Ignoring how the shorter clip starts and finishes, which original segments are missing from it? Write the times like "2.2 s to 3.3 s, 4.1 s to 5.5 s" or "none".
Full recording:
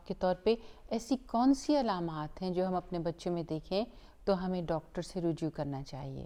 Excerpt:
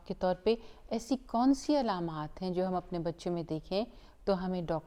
none